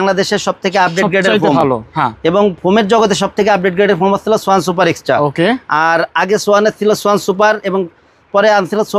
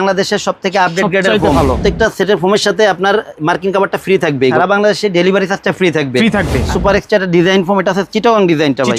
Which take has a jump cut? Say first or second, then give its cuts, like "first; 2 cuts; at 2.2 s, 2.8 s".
second; 3 cuts; at 1.6 s, 4.5 s, 6.7 s